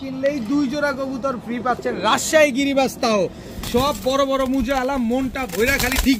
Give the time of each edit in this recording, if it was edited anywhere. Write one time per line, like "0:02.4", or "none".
none